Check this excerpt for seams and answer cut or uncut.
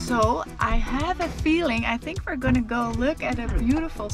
uncut